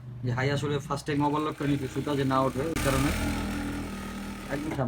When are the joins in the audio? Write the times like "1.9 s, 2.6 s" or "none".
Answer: none